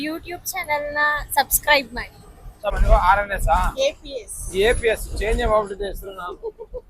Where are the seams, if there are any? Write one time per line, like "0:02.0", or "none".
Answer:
0:02.8